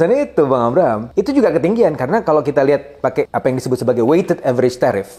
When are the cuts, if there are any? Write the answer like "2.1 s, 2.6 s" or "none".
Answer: 1.0 s, 3.3 s